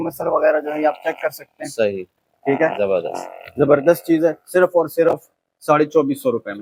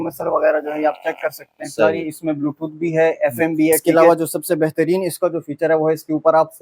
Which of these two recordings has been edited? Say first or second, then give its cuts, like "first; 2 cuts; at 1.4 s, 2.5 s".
second; 2 cuts; at 1.8 s, 3.8 s